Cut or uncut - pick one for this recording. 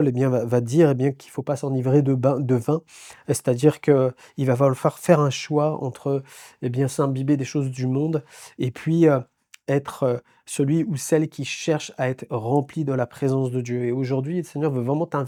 uncut